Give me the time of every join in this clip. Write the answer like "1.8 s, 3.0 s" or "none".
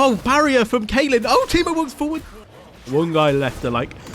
2.3 s